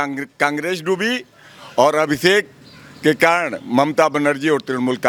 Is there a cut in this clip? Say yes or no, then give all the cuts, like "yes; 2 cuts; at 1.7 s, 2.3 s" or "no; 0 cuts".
no; 0 cuts